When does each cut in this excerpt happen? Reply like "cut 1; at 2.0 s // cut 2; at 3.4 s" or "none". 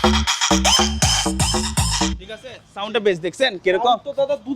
none